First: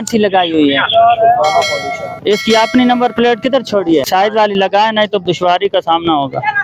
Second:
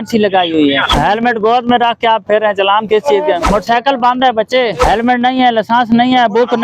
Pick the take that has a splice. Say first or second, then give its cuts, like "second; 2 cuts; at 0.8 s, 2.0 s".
second; 3 cuts; at 0.9 s, 3.5 s, 4.9 s